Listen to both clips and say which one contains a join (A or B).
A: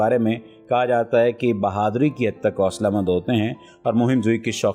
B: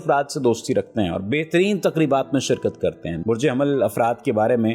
B